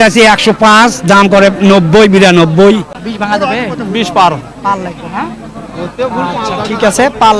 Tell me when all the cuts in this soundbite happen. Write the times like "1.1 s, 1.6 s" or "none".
2.9 s